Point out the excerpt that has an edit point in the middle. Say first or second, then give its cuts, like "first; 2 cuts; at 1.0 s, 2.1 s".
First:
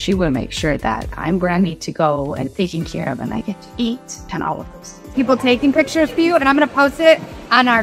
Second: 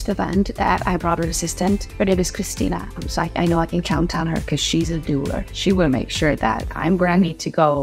first; 1 cut; at 5.1 s